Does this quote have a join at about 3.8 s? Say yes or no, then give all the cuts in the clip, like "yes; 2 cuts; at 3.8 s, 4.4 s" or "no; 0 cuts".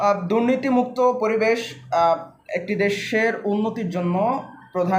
no; 0 cuts